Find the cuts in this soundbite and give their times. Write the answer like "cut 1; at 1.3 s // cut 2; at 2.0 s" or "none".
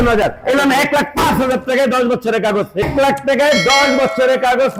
cut 1; at 2.8 s